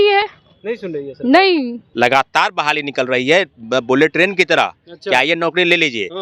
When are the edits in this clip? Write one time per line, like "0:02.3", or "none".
0:01.8